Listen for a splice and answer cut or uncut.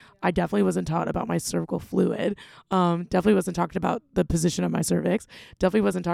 uncut